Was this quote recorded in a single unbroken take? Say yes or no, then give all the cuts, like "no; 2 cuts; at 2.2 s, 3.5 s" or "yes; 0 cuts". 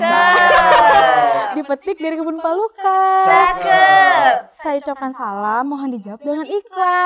yes; 0 cuts